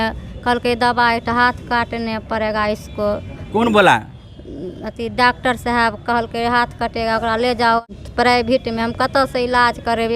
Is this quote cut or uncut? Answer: cut